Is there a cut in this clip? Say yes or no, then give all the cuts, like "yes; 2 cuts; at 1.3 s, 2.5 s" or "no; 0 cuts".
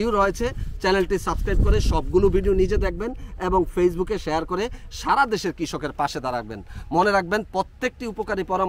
no; 0 cuts